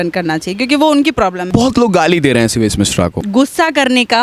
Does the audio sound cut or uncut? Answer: cut